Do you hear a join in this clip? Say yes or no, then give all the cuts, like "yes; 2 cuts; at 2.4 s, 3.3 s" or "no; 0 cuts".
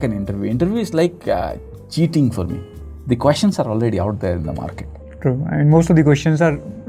no; 0 cuts